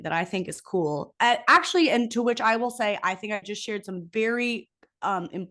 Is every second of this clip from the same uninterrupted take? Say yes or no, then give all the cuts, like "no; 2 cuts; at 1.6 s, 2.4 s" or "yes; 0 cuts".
yes; 0 cuts